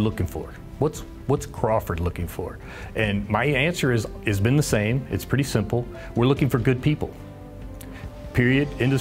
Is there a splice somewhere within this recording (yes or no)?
no